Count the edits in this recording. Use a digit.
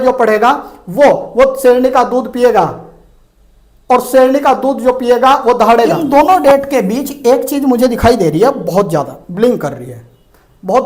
1